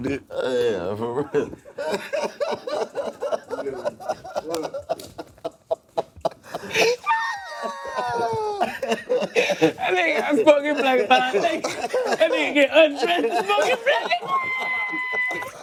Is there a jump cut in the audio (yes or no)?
no